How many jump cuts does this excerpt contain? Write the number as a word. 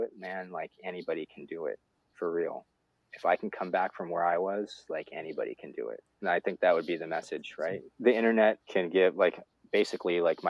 three